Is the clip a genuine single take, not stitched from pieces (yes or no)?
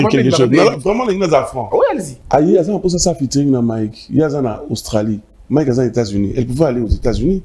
no